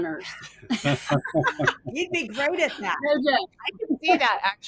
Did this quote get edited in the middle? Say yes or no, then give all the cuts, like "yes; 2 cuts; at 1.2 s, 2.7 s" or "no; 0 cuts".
no; 0 cuts